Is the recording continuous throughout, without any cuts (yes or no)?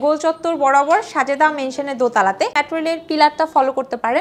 no